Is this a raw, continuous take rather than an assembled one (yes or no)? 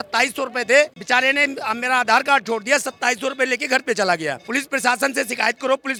yes